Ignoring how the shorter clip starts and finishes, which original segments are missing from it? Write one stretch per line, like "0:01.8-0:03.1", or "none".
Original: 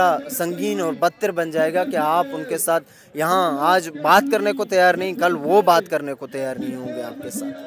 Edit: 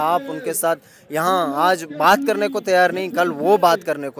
none